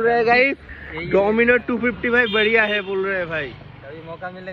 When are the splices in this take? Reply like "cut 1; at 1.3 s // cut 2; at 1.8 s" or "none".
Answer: none